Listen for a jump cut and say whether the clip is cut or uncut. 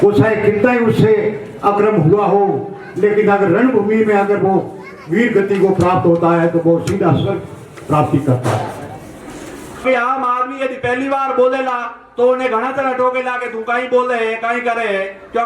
cut